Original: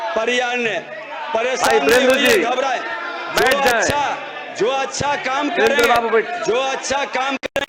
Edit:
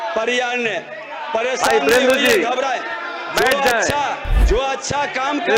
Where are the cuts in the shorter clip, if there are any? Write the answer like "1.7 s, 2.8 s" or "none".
4.3 s